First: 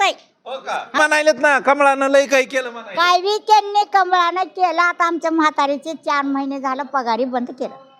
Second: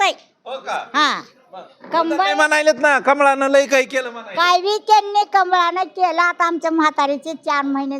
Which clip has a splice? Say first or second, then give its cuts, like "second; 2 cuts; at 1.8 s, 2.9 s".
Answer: first; 1 cut; at 1.0 s